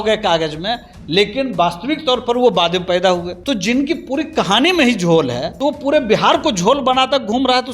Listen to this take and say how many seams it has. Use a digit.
2